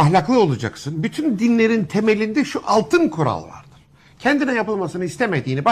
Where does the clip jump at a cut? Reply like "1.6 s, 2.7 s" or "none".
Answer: none